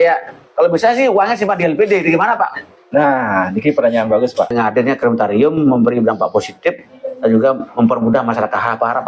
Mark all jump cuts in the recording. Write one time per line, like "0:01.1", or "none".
0:04.5